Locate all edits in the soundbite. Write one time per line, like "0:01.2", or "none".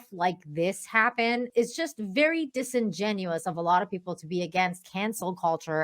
0:01.5